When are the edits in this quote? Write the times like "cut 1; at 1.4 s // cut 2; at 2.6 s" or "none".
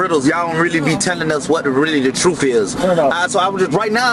none